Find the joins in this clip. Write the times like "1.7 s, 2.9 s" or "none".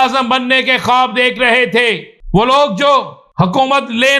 2.1 s, 3.2 s